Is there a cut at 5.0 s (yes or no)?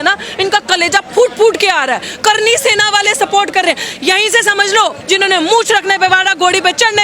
yes